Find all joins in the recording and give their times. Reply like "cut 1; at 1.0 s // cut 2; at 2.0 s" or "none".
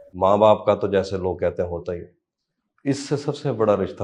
none